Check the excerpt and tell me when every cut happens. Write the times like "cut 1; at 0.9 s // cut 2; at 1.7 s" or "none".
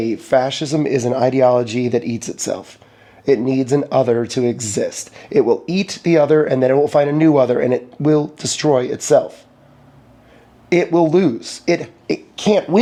none

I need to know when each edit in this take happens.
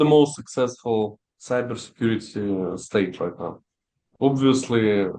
none

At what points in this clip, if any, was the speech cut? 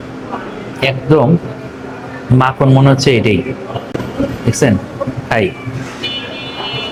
none

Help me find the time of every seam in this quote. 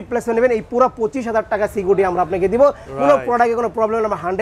none

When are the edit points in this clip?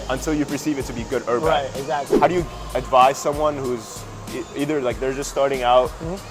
cut 1; at 2.1 s

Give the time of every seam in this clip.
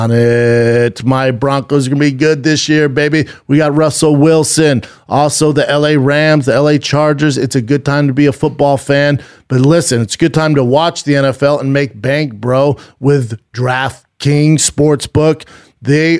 none

